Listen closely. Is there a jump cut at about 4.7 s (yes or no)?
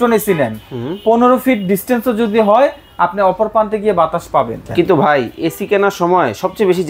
yes